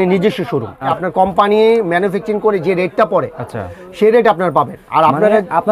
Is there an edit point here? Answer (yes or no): yes